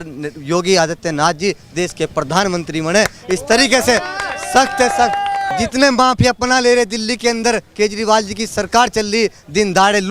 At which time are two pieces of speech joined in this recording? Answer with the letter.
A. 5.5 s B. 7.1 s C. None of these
A